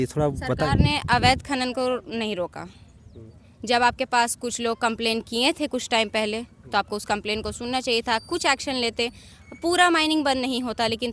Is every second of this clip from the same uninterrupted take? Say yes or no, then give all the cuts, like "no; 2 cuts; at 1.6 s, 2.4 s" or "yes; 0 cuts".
yes; 0 cuts